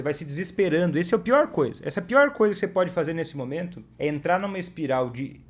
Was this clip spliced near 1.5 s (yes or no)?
no